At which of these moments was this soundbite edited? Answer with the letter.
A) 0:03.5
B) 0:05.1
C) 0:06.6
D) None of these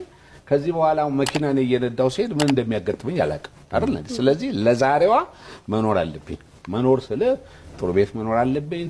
D